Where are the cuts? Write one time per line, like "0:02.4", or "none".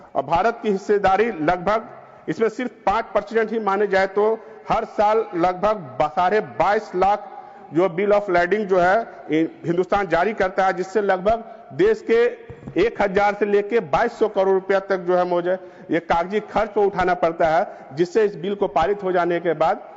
none